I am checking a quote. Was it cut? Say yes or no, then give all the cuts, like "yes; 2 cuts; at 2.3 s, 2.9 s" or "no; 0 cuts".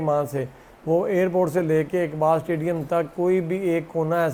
no; 0 cuts